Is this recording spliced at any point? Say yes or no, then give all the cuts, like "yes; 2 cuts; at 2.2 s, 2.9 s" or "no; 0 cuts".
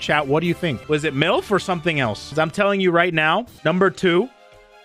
no; 0 cuts